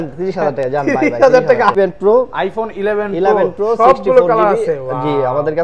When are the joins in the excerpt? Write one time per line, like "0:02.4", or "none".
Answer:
0:01.8

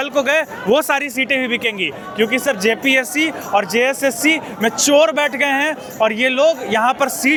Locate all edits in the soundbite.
none

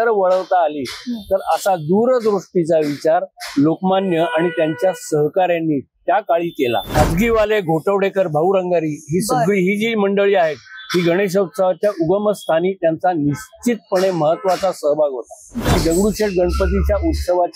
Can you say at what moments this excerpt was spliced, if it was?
0:06.9
0:15.7

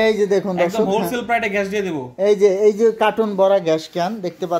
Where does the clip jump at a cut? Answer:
none

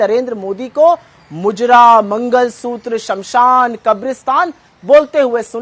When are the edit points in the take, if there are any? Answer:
none

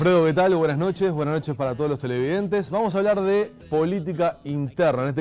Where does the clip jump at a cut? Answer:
0:01.2

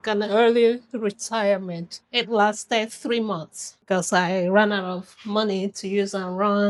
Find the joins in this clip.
none

